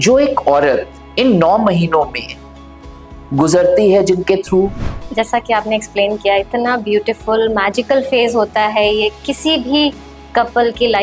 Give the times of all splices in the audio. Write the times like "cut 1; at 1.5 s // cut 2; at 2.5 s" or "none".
cut 1; at 4.9 s